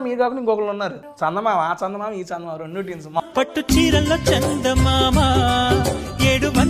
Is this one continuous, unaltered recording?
no; 2 cuts; at 1.0 s, 3.2 s

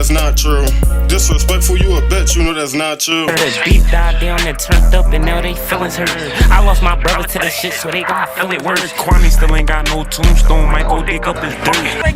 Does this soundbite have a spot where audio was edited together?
yes; 1 cut; at 3.2 s

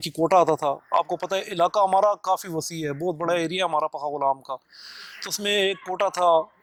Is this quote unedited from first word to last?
yes; 0 cuts

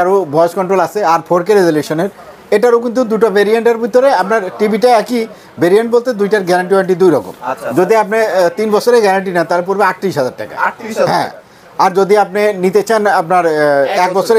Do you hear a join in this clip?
no; 0 cuts

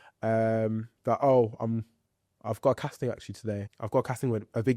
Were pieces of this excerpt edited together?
yes; 1 cut; at 3.6 s

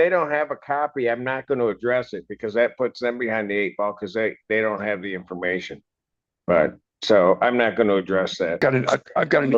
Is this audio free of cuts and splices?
no; 1 cut; at 8.6 s

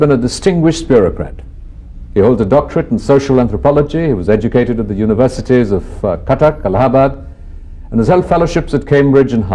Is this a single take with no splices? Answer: no; 1 cut; at 2.9 s

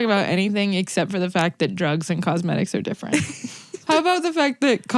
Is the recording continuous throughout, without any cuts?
no; 1 cut; at 3.8 s

